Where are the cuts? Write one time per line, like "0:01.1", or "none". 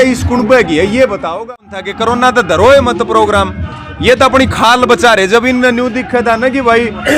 0:01.8